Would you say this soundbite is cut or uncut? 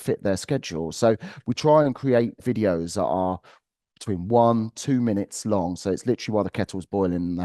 cut